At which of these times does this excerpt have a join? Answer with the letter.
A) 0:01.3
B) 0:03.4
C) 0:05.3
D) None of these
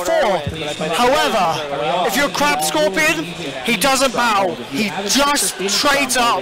C